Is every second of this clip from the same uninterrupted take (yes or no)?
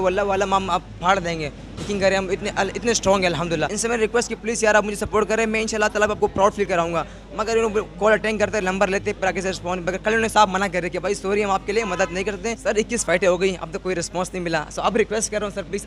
no